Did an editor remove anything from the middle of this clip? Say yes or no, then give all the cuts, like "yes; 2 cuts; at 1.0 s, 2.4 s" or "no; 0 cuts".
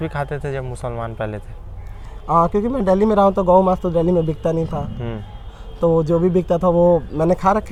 no; 0 cuts